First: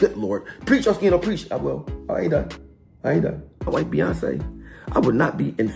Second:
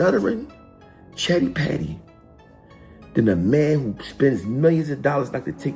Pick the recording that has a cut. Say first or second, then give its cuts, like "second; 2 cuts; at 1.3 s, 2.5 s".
first; 1 cut; at 3.7 s